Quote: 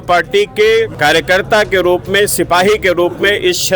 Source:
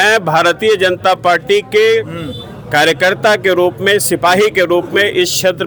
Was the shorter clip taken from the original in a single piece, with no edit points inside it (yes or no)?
no